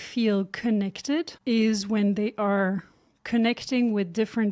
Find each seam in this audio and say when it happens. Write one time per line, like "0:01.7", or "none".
0:01.3